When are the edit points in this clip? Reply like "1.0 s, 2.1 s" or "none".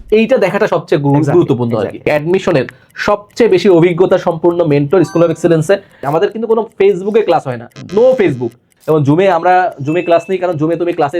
2.1 s, 6.1 s, 8.7 s